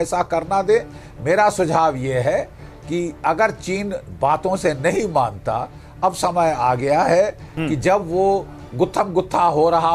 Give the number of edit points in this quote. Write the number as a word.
zero